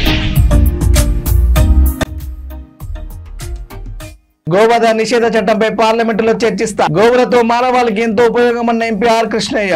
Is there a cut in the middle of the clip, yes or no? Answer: no